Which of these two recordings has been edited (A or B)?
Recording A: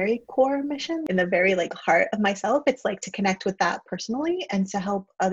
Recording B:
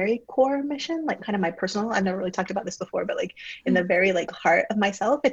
A